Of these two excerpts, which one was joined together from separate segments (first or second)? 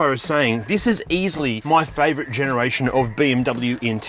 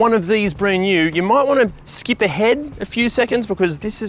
first